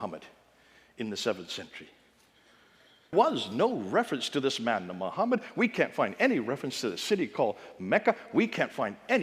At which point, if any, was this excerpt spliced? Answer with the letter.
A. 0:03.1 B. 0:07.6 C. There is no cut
A